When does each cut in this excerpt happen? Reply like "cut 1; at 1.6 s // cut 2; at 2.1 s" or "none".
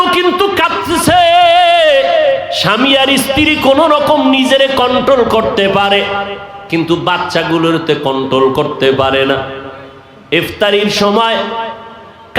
cut 1; at 2.5 s